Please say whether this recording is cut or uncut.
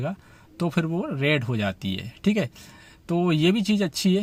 uncut